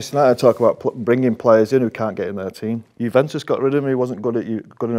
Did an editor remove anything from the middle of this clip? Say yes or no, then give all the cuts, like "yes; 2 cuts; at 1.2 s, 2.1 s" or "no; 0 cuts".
yes; 1 cut; at 2.9 s